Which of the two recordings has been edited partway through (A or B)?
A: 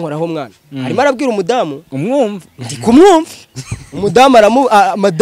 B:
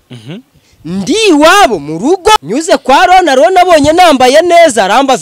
B